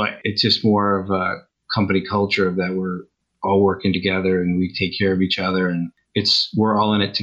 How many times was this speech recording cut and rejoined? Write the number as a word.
one